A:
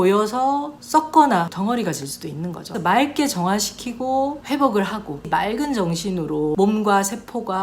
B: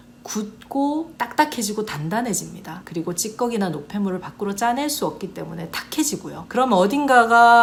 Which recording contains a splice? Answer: A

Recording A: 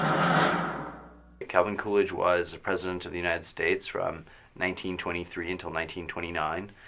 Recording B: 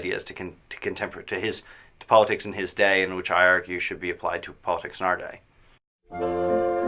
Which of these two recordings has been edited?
B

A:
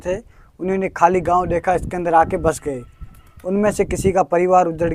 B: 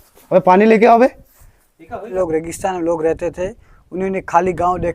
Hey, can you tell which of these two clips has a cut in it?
B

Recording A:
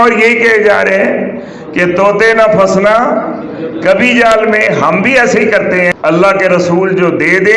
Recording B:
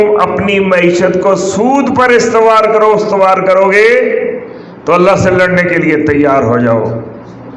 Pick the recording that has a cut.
A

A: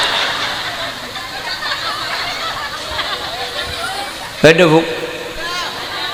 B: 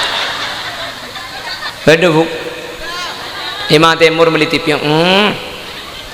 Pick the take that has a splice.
B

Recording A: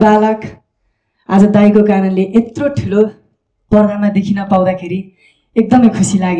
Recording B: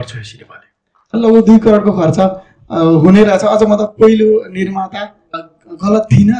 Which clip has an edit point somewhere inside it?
B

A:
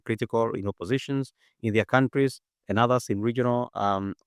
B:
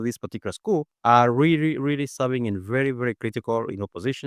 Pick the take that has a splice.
B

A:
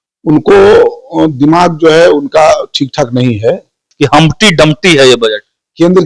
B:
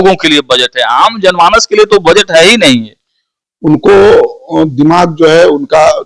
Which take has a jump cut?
A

